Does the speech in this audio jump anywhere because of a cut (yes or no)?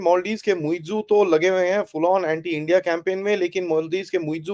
no